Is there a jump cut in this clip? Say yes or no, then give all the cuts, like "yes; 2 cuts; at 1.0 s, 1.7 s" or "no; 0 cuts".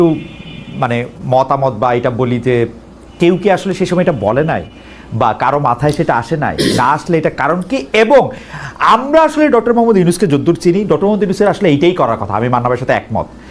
no; 0 cuts